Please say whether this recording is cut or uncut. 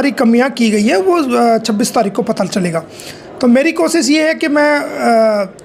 uncut